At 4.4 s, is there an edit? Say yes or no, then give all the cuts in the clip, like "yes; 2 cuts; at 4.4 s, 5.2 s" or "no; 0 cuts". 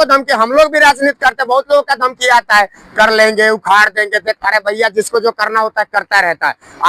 no; 0 cuts